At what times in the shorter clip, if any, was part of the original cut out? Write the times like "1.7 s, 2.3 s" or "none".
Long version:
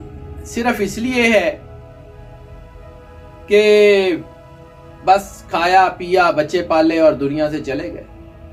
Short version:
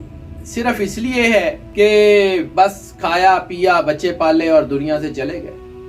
1.6 s, 2.5 s